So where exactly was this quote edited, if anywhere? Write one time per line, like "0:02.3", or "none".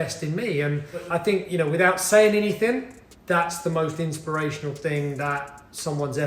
0:01.1